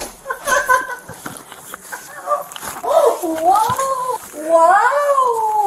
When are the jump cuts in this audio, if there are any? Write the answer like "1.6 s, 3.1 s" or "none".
4.1 s